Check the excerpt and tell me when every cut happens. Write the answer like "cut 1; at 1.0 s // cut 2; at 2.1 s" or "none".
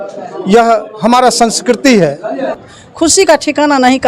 cut 1; at 2.7 s